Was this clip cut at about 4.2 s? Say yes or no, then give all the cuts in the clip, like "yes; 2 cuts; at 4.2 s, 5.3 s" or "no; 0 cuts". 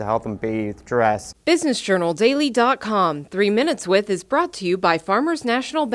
no; 1 cut; at 1.3 s